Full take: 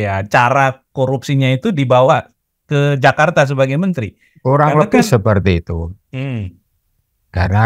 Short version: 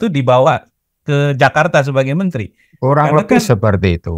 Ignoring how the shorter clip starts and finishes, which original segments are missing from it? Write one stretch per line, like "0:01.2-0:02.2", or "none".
none

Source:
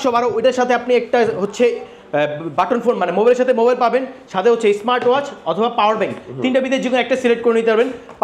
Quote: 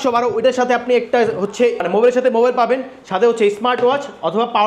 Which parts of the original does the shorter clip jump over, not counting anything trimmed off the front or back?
0:01.8-0:03.0

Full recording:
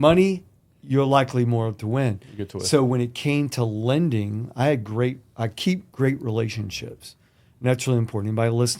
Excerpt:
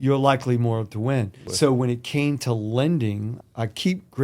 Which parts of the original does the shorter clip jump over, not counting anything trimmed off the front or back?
0:02.3-0:02.5
0:04.5-0:05.2

